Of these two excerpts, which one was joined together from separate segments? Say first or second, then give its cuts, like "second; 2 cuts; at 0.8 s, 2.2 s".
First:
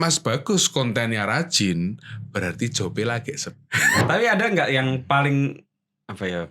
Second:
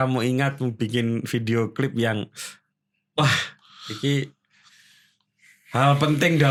first; 1 cut; at 4.0 s